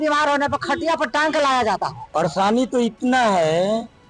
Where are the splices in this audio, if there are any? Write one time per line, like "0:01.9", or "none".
0:02.0